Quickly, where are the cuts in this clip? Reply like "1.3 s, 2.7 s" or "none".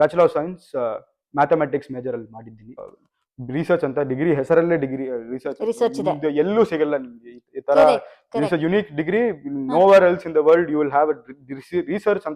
2.9 s